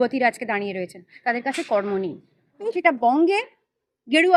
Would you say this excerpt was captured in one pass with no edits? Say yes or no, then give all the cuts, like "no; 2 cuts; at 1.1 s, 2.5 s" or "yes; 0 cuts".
no; 1 cut; at 2.6 s